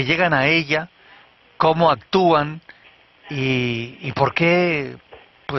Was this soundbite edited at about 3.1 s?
yes; 1 cut; at 3.1 s

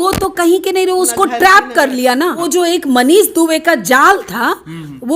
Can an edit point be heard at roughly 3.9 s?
no; 1 cut; at 2.4 s

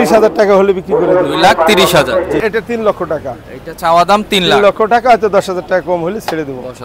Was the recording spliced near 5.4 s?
no; 1 cut; at 2.4 s

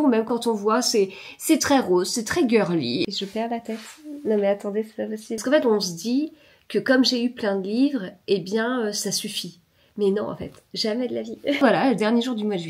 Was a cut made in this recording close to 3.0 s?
yes; 3 cuts; at 3.0 s, 5.4 s, 11.6 s

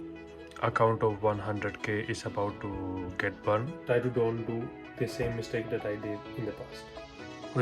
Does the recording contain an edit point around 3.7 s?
yes; 1 cut; at 3.7 s

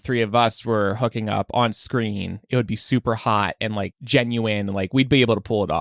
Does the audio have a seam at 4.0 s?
no; 0 cuts

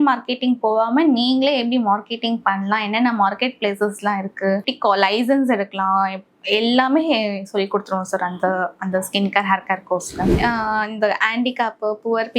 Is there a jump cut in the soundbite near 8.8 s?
no; 2 cuts; at 4.7 s, 10.3 s

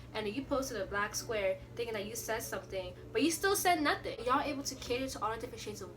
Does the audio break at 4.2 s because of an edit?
yes; 1 cut; at 4.2 s

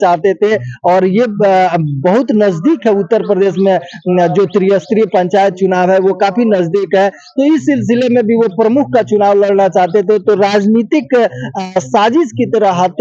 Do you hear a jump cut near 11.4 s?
no; 0 cuts

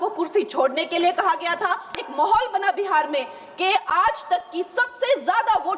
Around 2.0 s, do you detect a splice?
yes; 1 cut; at 2.0 s

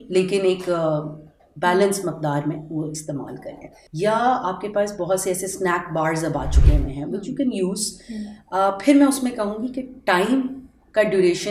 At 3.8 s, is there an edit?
no; 0 cuts

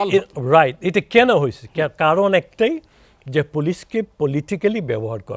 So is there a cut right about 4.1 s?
no; 0 cuts

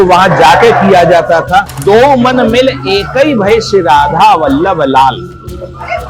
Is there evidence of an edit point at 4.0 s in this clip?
no; 1 cut; at 1.7 s

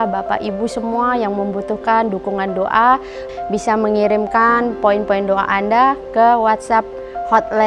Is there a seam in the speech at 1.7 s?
no; 0 cuts

